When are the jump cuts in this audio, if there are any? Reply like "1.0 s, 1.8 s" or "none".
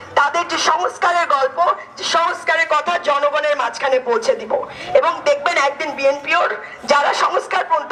none